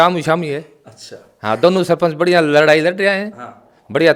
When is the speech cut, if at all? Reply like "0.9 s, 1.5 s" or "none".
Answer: none

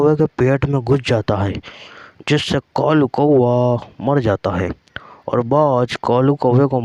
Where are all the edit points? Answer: none

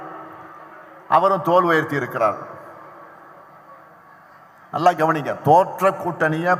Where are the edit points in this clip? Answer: none

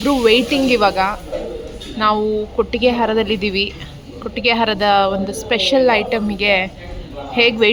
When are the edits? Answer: none

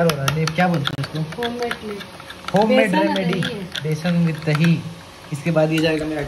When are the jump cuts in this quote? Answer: none

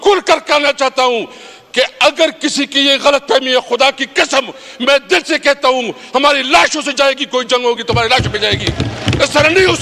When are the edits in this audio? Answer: none

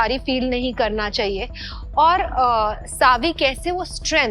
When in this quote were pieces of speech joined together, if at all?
none

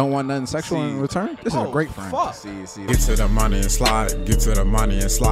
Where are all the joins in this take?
2.7 s

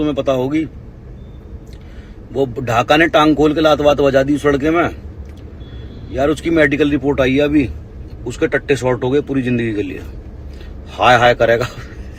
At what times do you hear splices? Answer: none

